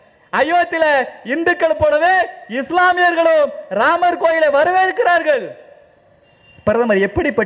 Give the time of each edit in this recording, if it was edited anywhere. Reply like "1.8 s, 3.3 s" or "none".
none